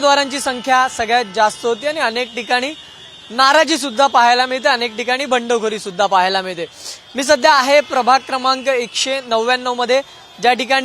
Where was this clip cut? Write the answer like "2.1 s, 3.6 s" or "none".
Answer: 1.1 s